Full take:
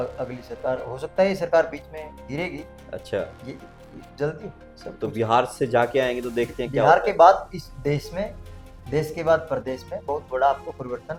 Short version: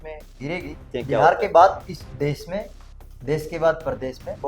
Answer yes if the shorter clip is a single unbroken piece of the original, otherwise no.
no